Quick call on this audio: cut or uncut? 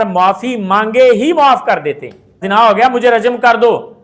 cut